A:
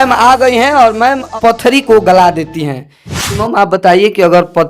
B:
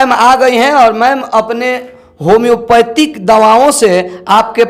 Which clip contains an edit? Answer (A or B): A